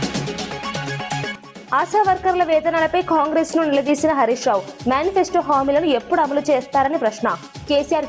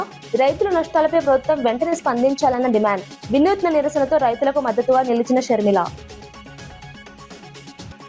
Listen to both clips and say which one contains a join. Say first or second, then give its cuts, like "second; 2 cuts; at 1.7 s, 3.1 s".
first; 1 cut; at 1.5 s